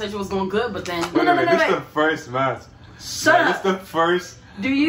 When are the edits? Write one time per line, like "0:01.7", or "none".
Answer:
0:01.1